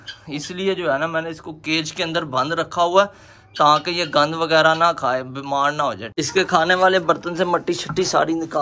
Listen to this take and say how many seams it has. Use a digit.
1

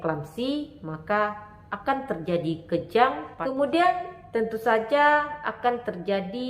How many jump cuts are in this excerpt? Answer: 1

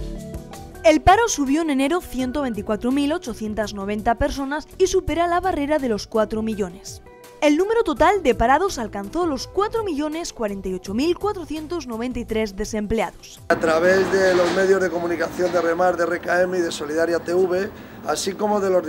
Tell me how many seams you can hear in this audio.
1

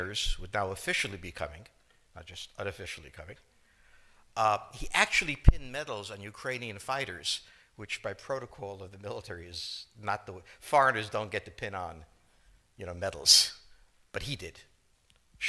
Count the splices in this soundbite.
1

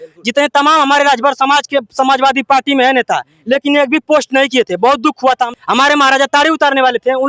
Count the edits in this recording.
1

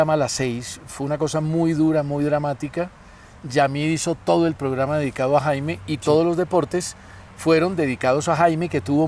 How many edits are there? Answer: 0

